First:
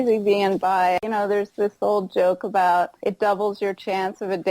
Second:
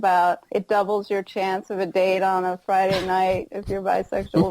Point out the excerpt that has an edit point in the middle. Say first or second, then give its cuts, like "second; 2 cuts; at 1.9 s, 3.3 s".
first; 1 cut; at 1.0 s